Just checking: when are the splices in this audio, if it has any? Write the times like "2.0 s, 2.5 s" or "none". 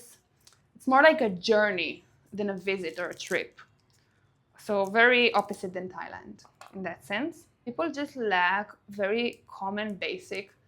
7.7 s